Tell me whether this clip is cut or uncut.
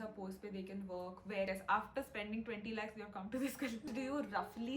cut